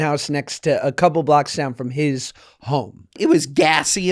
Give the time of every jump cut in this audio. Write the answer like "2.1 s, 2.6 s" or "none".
3.2 s